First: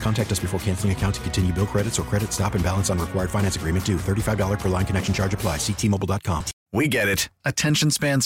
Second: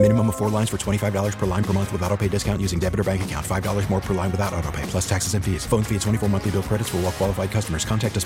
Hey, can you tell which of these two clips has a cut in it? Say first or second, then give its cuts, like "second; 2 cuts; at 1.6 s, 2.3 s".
first; 1 cut; at 6.6 s